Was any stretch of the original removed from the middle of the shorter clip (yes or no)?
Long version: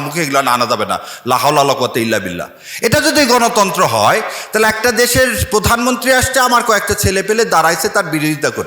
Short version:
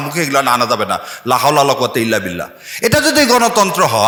no